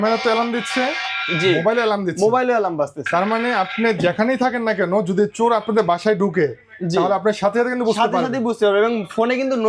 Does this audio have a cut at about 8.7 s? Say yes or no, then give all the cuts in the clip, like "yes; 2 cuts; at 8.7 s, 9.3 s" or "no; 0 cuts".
no; 0 cuts